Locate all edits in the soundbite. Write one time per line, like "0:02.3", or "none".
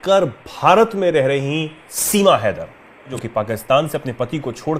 0:03.1